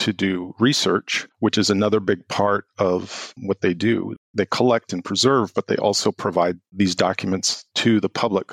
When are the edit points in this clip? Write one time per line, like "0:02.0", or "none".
0:01.2